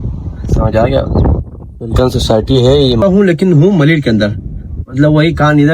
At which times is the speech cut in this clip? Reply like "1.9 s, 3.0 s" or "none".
3.0 s

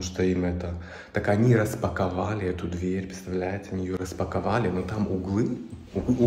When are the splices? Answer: none

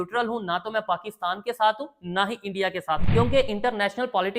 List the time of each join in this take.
3.0 s

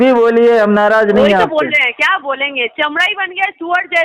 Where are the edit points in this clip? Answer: none

